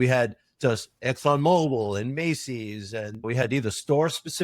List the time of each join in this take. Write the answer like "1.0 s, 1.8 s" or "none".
3.2 s